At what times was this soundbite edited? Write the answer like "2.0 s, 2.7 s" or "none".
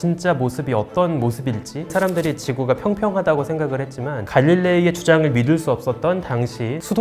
1.9 s, 4.2 s